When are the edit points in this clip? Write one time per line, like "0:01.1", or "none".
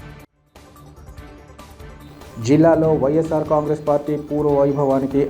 0:01.4